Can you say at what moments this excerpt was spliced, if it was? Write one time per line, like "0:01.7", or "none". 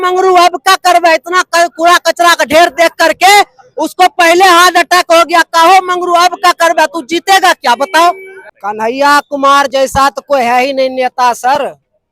0:08.3